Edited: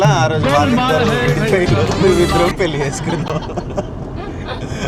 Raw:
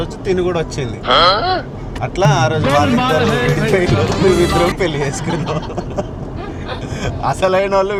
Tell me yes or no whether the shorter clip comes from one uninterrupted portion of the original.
yes